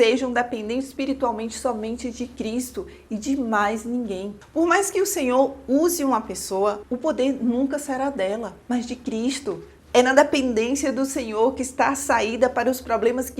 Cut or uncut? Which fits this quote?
cut